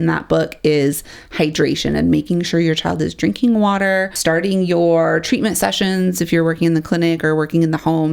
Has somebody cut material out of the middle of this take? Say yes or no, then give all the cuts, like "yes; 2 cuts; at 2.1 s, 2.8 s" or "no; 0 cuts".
yes; 1 cut; at 4.2 s